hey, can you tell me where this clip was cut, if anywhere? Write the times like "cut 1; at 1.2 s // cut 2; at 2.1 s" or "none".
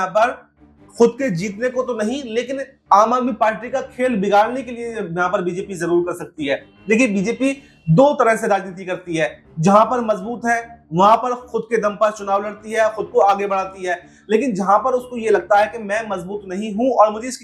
none